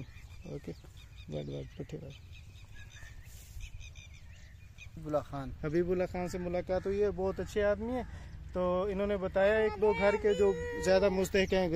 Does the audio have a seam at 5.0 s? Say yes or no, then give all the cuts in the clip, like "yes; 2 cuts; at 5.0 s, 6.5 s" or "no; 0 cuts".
yes; 1 cut; at 5.0 s